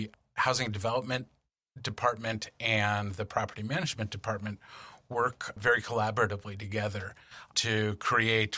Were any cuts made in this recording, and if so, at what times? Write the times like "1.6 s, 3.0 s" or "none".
none